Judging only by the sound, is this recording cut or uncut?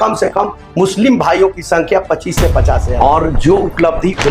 cut